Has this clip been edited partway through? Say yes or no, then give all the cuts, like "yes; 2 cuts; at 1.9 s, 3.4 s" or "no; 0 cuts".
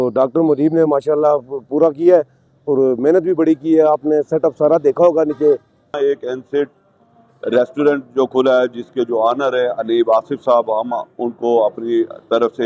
yes; 1 cut; at 6.0 s